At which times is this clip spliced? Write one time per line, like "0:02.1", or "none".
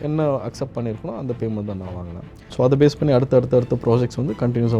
0:02.4